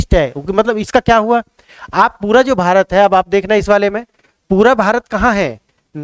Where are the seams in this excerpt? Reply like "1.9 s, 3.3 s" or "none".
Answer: none